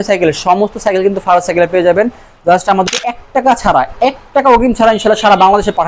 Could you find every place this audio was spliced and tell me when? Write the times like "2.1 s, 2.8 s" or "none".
2.9 s